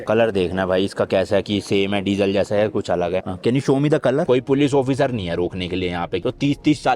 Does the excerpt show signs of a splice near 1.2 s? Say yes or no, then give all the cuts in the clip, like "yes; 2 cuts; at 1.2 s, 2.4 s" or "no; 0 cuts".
no; 2 cuts; at 4.3 s, 6.2 s